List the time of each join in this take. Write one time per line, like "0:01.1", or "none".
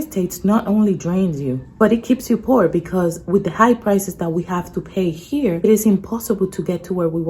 0:01.6
0:05.6

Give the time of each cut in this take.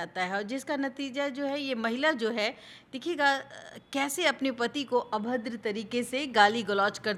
none

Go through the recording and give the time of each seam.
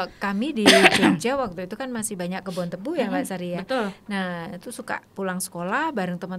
none

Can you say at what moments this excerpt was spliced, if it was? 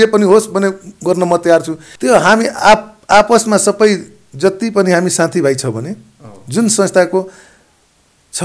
0:01.8

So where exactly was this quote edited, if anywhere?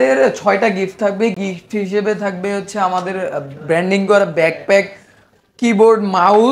none

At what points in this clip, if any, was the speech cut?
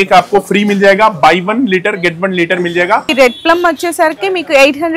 0:03.1

